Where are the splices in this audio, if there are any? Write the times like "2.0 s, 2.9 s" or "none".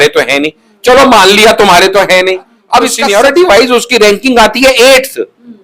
3.0 s

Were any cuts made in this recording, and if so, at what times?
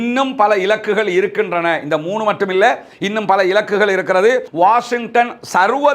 4.5 s

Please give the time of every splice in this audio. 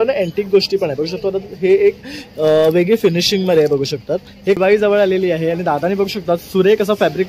4.6 s

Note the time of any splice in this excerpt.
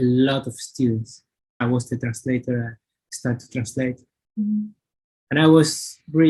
1.6 s

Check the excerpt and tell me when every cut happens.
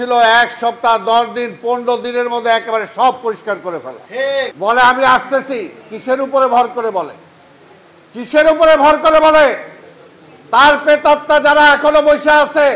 4.5 s

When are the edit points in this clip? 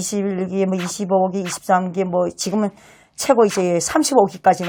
none

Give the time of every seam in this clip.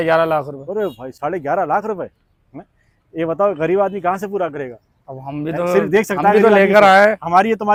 none

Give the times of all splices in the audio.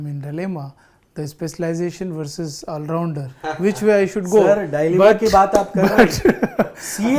none

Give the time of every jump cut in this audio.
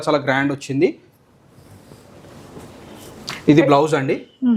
none

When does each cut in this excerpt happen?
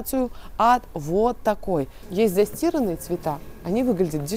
2.0 s

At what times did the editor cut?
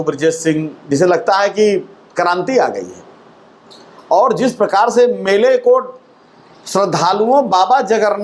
none

